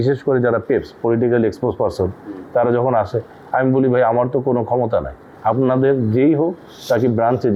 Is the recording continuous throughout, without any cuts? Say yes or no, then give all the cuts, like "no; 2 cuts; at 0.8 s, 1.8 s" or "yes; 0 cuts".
yes; 0 cuts